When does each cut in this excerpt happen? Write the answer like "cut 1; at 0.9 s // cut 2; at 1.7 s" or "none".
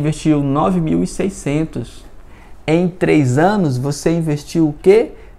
none